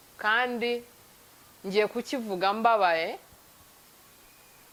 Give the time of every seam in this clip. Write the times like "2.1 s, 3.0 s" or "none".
none